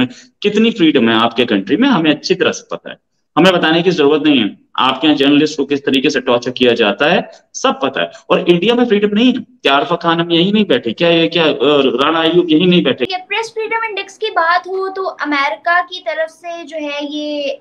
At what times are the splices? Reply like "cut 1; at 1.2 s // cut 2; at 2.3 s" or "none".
cut 1; at 13.1 s